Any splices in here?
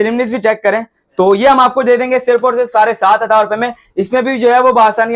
no; 0 cuts

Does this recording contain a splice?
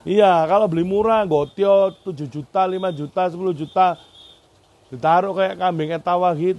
no; 0 cuts

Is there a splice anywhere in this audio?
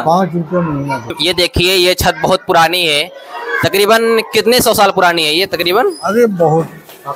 yes; 1 cut; at 1.2 s

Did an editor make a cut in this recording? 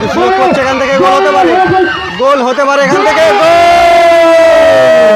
no; 0 cuts

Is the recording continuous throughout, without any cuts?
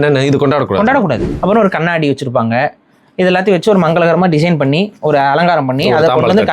no; 1 cut; at 1.3 s

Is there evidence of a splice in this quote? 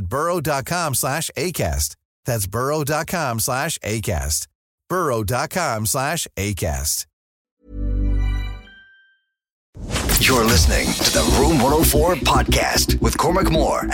yes; 1 cut; at 9.9 s

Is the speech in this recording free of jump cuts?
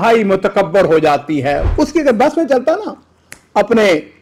no; 1 cut; at 1.6 s

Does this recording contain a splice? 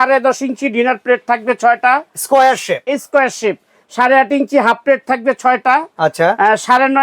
no; 0 cuts

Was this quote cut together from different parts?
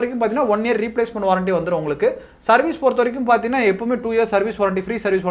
no; 0 cuts

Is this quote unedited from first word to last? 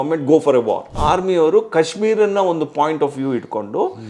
no; 1 cut; at 0.9 s

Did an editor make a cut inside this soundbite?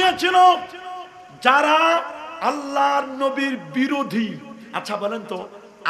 no; 0 cuts

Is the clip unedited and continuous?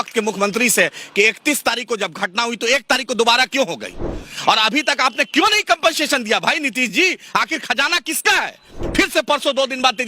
no; 1 cut; at 8.8 s

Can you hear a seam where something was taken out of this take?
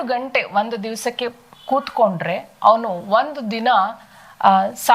no; 0 cuts

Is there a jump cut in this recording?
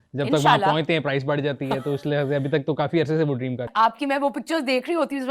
yes; 1 cut; at 3.7 s

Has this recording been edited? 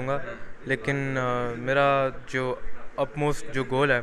no; 0 cuts

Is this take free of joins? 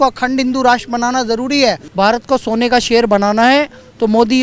no; 1 cut; at 1.9 s

